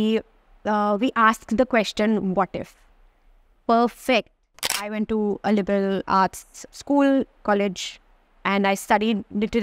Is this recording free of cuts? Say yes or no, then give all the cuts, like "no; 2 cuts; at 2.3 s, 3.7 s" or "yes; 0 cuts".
no; 3 cuts; at 4.7 s, 6.2 s, 7.4 s